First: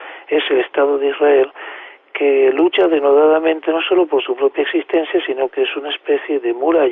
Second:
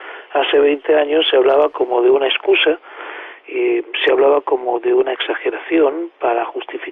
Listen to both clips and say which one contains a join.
first; 1 cut; at 1.2 s

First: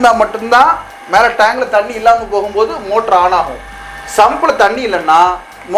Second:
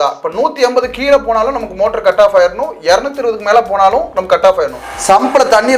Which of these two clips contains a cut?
second; 1 cut; at 4.9 s

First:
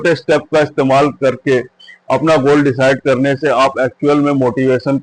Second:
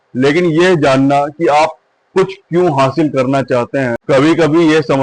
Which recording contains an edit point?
second; 1 cut; at 4.0 s

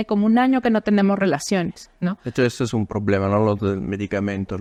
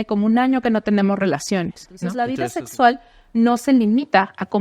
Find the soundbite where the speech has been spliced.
second; 1 cut; at 2.1 s

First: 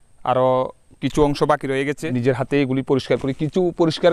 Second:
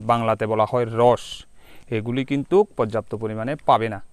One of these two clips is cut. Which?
first; 1 cut; at 2.1 s

